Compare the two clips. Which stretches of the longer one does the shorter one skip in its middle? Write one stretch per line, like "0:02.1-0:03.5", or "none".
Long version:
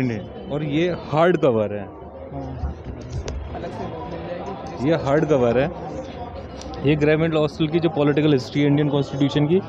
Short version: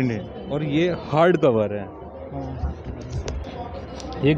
0:03.4-0:06.1